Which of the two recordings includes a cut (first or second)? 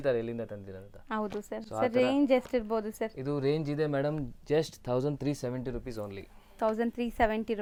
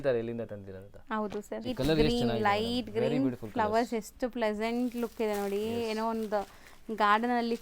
second